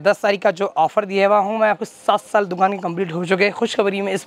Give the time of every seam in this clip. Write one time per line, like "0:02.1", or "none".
none